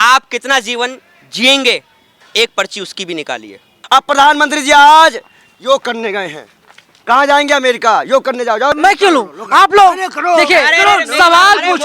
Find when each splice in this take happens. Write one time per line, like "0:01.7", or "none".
0:03.8
0:08.8